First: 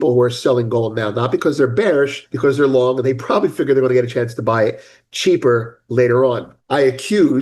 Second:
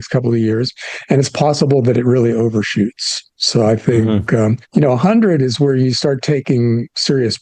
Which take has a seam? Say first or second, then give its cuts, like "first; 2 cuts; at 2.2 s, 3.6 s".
first; 2 cuts; at 2.2 s, 6.5 s